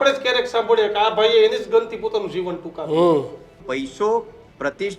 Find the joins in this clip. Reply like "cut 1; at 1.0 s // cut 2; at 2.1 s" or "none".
cut 1; at 3.6 s